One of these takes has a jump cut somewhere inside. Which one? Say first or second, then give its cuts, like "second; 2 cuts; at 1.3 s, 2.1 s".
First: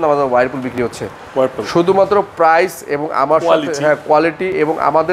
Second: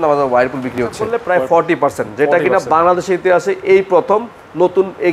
second; 1 cut; at 1.1 s